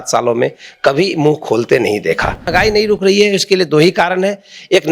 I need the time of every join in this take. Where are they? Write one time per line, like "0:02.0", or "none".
0:02.4

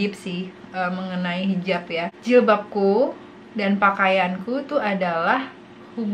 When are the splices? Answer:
0:02.1

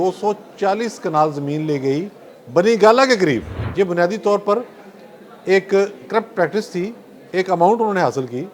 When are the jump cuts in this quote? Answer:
0:03.6

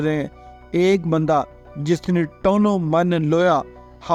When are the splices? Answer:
none

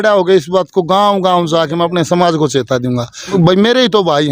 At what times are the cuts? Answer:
0:03.3

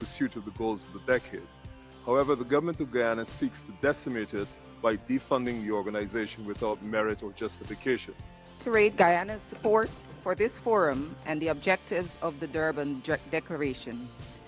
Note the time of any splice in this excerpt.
0:08.6

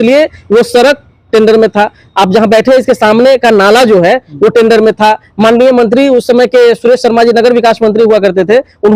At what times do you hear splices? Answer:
none

